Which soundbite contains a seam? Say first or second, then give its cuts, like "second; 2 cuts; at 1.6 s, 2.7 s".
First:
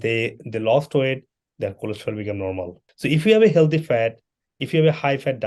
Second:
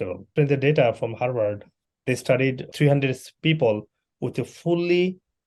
first; 1 cut; at 2.8 s